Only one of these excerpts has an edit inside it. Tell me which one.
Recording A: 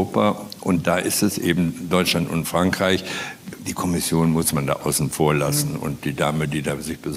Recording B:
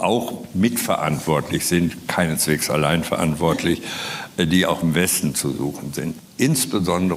B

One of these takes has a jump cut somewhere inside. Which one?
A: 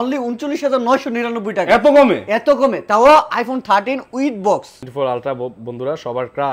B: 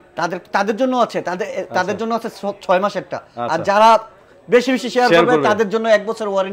A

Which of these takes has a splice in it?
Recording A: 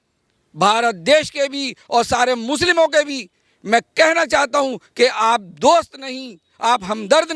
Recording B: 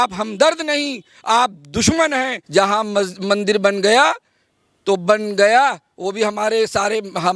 B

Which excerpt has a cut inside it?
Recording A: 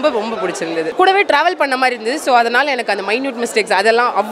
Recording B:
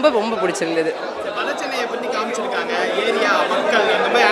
A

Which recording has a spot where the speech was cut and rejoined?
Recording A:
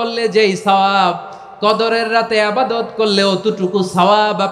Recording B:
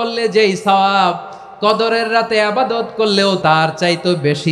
B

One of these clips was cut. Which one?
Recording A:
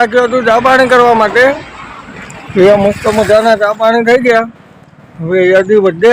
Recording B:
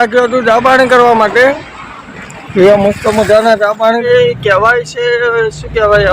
B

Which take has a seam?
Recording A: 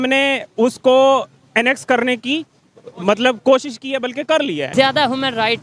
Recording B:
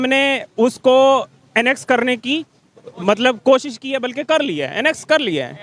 A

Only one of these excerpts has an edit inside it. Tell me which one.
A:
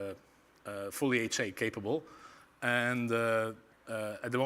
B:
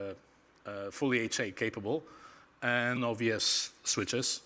A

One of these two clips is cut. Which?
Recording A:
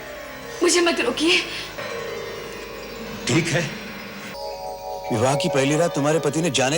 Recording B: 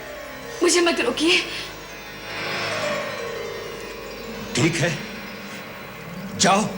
A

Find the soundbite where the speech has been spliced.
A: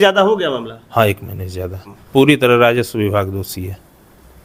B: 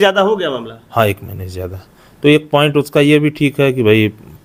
A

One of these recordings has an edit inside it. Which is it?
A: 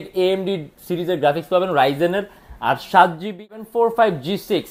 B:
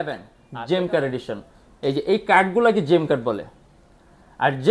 A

